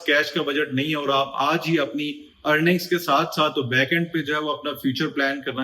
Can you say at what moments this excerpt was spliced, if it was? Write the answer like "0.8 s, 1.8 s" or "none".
none